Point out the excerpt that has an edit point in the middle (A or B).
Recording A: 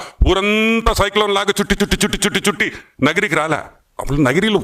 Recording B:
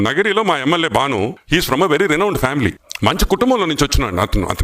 B